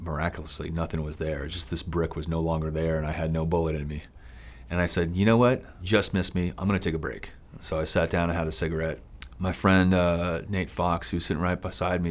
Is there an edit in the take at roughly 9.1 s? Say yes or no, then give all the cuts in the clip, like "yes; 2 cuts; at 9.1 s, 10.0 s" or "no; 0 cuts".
no; 1 cut; at 5.7 s